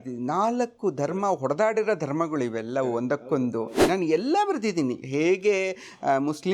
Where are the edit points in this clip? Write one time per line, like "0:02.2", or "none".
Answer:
0:03.8